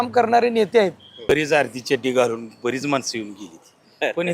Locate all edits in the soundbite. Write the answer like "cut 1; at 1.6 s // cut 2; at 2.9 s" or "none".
cut 1; at 1.3 s